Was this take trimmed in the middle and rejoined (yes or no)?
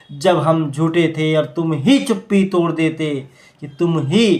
no